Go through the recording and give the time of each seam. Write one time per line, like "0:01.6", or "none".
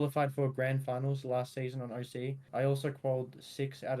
0:02.4